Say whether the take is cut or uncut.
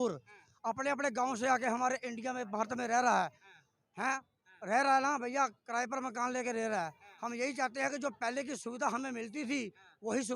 uncut